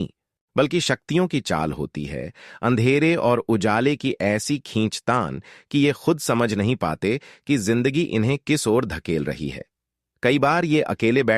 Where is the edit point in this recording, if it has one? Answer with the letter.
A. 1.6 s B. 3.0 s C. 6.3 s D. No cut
A